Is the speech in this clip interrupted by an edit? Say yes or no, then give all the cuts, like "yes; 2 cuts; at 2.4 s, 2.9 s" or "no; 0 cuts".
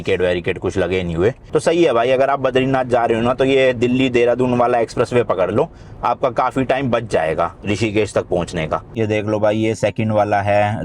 yes; 2 cuts; at 1.4 s, 8.9 s